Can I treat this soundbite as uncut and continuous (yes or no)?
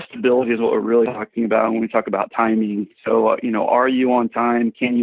yes